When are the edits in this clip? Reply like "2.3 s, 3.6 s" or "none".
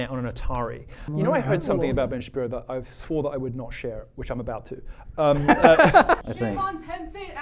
1.0 s, 6.2 s